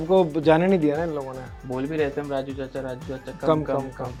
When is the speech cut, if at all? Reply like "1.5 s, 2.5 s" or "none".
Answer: none